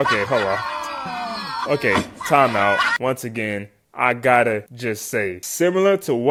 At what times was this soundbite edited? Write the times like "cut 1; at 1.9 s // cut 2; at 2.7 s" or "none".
none